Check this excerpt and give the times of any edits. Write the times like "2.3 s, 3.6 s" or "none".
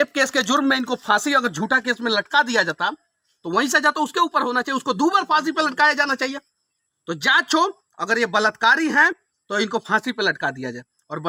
none